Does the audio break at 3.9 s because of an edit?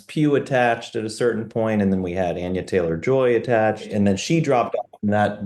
yes; 1 cut; at 3.9 s

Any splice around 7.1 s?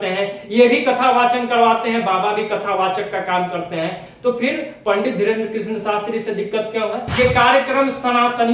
yes; 1 cut; at 7.1 s

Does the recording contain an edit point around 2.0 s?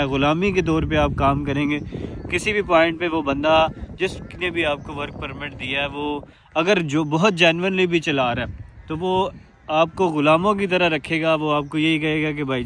no; 0 cuts

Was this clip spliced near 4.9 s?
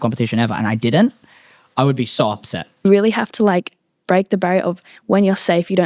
no; 1 cut; at 2.8 s

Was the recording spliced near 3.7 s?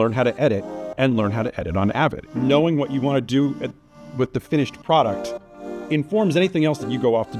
no; 1 cut; at 2.2 s

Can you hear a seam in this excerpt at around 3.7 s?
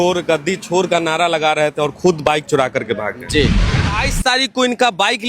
yes; 1 cut; at 3.7 s

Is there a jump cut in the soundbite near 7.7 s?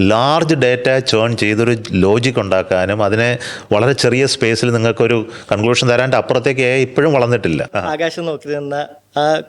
yes; 1 cut; at 7.7 s

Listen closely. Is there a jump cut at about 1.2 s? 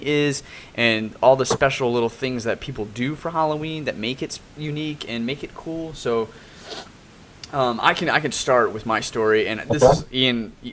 no; 1 cut; at 4.2 s

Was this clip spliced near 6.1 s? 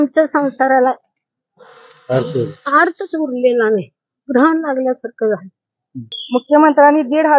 yes; 1 cut; at 6.1 s

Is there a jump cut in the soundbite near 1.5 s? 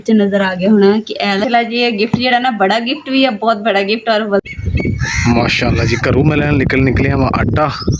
yes; 2 cuts; at 1.5 s, 4.4 s

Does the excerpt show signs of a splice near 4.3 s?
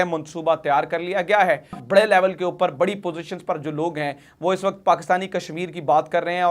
no; 1 cut; at 1.8 s

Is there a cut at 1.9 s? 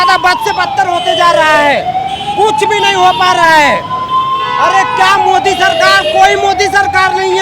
no; 0 cuts

